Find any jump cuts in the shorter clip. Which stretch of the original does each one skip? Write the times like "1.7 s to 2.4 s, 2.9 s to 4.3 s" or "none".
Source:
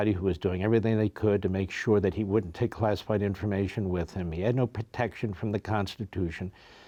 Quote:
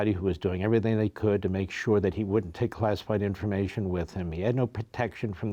none

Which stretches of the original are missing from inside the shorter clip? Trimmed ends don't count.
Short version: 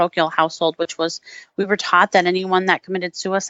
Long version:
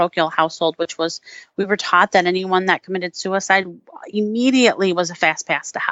none

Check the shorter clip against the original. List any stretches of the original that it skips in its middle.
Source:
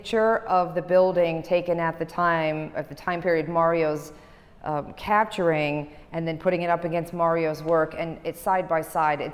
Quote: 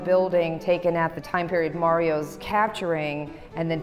2.0 s to 2.9 s, 4.1 s to 4.9 s

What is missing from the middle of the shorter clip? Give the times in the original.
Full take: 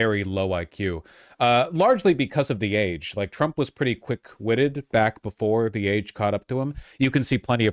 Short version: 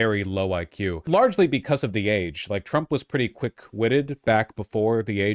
1.0 s to 1.7 s

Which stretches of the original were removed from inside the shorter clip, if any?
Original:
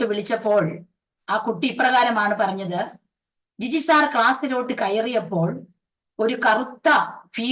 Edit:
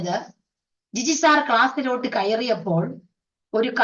none

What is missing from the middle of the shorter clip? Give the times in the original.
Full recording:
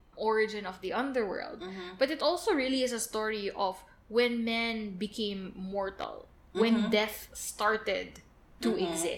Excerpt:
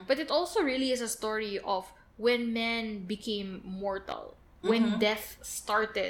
none

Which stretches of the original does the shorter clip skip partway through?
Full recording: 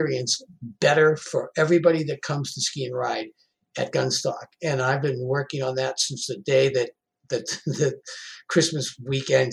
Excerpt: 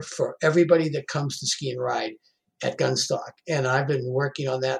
none

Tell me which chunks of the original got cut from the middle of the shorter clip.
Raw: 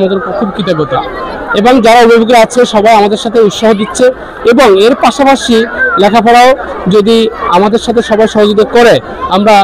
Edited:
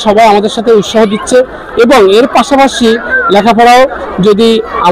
none

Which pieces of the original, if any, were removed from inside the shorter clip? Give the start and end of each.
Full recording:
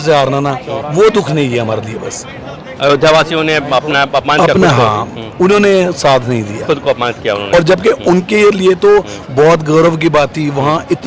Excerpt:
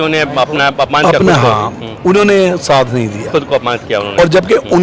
none

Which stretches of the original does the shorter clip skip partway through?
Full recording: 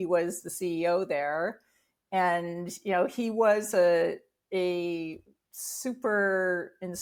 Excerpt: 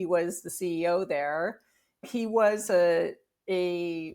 2.1 s to 3.1 s

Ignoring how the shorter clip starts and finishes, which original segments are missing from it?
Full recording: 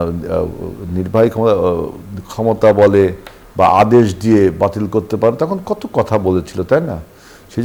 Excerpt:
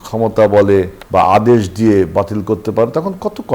3.2 s to 3.4 s

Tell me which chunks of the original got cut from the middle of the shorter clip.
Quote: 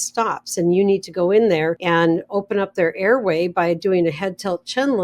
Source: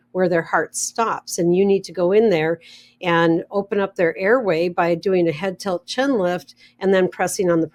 2.6 s to 3.0 s

